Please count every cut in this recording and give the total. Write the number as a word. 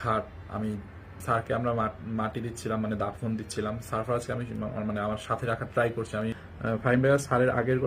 two